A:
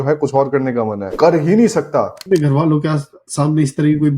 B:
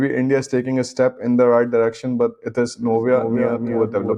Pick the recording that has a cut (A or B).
A